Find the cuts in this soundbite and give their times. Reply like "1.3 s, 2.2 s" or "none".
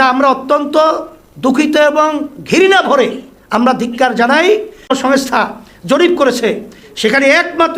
4.9 s